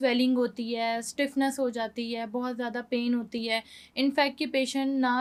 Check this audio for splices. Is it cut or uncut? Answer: uncut